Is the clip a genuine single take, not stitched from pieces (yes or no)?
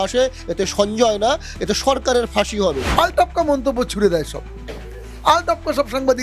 no